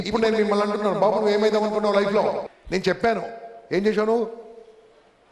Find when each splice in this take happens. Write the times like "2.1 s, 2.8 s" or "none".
2.5 s